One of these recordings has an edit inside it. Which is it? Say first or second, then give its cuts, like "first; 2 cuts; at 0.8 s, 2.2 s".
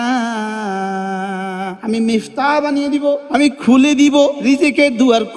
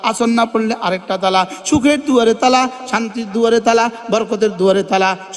first; 3 cuts; at 1.8 s, 3.2 s, 4.4 s